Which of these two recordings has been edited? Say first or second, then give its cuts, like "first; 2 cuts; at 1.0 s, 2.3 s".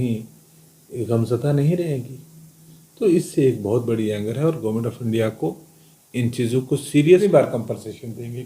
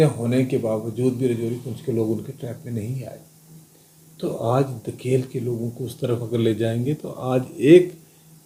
first; 1 cut; at 7.3 s